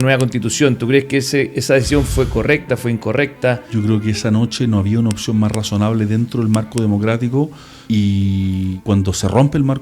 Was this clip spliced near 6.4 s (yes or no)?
no